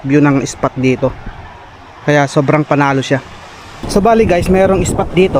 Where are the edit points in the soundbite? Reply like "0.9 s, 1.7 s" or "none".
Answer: 3.8 s